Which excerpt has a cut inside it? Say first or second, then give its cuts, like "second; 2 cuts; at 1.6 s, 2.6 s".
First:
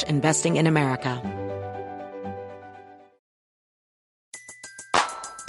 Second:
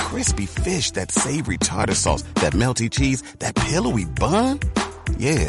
first; 1 cut; at 1.2 s